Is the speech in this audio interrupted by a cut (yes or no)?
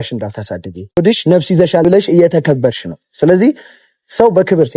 yes